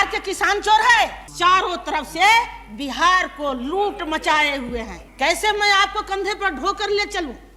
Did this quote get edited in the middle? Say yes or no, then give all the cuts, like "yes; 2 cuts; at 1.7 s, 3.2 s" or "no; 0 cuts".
yes; 2 cuts; at 1.2 s, 5.0 s